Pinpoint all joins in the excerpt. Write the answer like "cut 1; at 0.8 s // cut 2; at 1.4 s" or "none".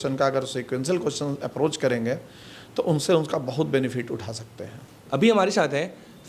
none

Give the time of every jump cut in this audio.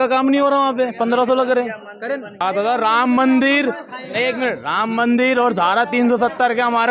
cut 1; at 2.4 s

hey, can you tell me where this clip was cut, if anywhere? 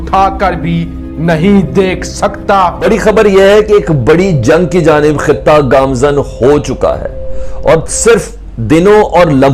cut 1; at 2.8 s

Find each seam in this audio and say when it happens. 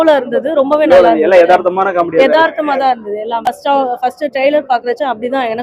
cut 1; at 3.4 s

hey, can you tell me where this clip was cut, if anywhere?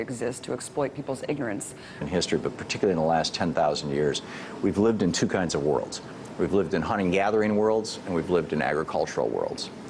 none

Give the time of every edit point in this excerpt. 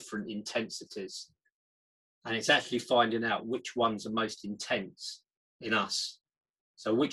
none

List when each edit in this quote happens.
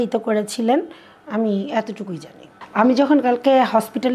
cut 1; at 2.6 s

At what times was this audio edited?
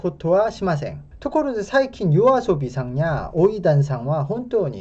none

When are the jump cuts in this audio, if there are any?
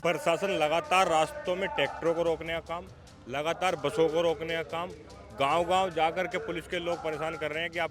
none

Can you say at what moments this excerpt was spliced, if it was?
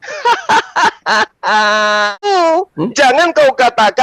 cut 1; at 2.2 s

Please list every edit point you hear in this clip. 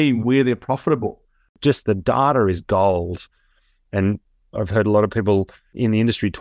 cut 1; at 1.6 s

